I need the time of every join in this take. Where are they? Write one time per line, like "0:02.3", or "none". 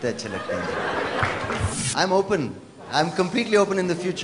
0:01.8